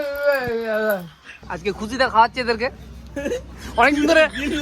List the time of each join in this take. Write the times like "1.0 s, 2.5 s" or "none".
1.5 s